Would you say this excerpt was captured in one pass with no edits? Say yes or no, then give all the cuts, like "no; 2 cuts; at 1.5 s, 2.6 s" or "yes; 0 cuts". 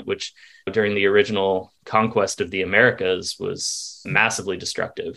no; 1 cut; at 4.1 s